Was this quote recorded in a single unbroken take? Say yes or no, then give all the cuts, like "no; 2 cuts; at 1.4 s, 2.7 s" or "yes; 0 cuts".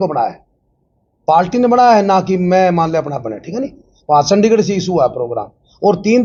yes; 0 cuts